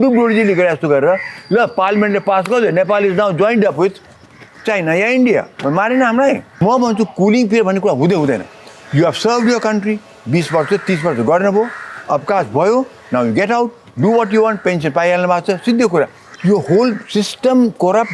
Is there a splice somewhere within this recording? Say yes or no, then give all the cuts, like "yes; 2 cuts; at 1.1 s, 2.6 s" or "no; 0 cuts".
yes; 2 cuts; at 6.6 s, 16.2 s